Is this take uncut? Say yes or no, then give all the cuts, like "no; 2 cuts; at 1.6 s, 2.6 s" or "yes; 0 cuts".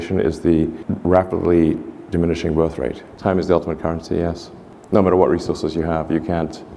no; 1 cut; at 3.1 s